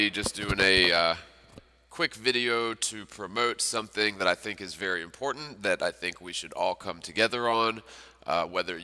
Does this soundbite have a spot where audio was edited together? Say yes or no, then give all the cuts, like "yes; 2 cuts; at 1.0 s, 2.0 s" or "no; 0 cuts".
no; 0 cuts